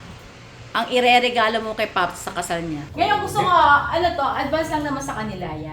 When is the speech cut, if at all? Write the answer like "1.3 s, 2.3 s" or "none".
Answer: 2.8 s